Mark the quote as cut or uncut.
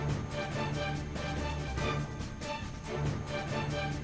uncut